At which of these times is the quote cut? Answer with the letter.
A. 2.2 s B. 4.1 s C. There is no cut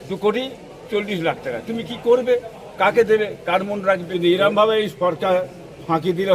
B